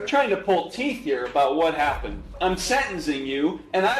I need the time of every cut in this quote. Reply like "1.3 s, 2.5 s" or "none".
2.3 s